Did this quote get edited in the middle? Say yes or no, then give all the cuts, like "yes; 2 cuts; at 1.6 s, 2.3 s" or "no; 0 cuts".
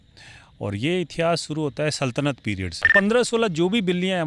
yes; 1 cut; at 2.9 s